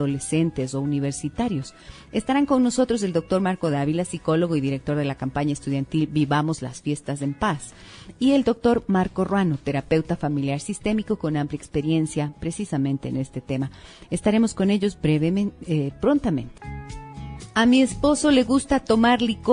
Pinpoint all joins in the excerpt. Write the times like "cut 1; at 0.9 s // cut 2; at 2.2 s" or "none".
cut 1; at 7.9 s